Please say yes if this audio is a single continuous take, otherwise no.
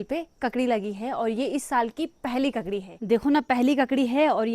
no